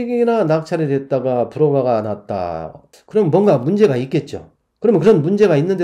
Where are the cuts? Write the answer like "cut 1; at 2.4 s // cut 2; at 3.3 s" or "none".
none